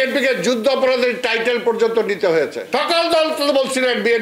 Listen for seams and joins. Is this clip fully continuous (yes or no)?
no